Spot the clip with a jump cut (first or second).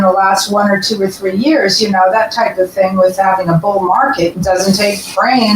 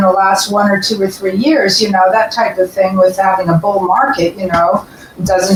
first